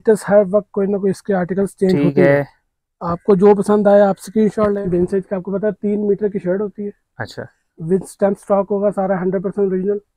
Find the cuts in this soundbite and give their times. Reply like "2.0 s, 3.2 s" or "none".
4.8 s

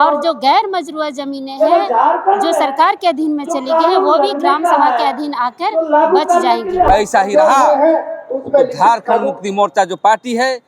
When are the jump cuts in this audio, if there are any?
6.9 s

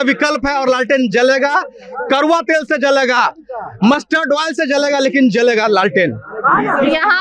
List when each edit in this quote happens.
none

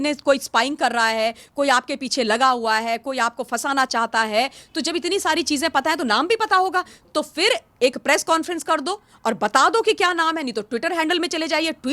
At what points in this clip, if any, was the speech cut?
none

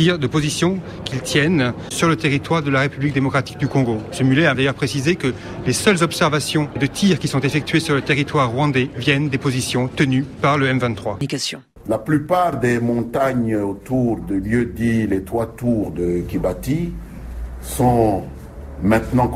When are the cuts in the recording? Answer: 11.2 s

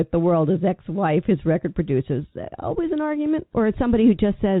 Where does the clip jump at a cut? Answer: 3.5 s

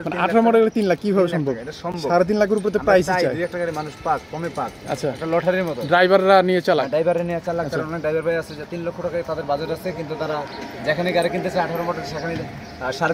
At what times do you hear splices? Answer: none

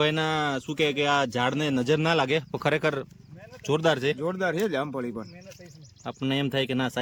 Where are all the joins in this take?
none

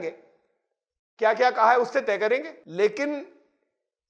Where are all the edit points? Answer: 2.6 s

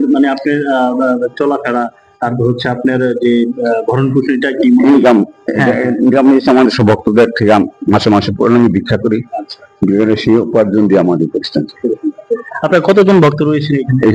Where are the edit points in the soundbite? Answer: none

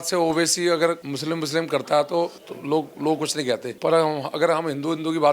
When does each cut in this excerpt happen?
1.1 s, 2.5 s, 3.7 s

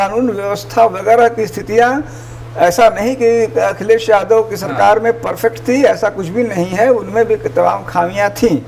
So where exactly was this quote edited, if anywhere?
none

